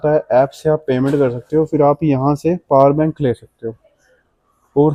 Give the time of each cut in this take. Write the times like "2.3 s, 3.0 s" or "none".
none